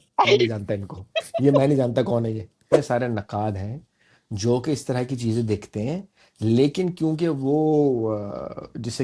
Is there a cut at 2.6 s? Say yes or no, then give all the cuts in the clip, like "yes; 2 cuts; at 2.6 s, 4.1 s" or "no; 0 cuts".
yes; 1 cut; at 2.6 s